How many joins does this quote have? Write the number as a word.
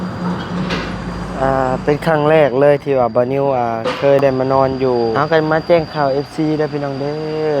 one